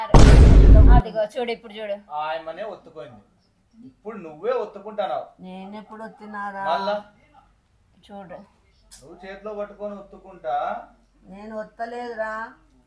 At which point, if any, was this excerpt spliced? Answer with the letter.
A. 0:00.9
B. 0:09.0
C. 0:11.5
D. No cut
A